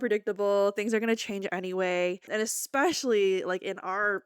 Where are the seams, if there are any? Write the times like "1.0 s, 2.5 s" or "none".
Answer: none